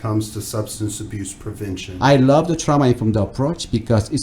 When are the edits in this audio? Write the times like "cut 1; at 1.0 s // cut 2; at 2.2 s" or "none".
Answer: cut 1; at 1.9 s

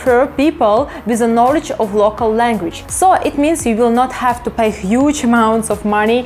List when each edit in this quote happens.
cut 1; at 2.8 s

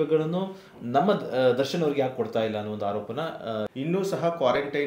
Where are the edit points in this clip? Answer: cut 1; at 3.7 s

